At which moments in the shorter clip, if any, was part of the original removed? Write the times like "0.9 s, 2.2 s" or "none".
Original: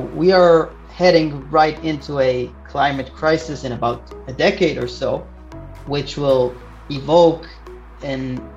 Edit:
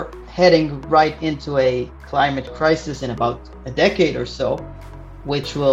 none